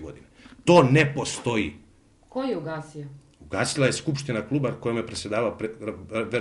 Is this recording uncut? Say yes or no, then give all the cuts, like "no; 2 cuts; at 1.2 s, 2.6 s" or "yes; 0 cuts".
yes; 0 cuts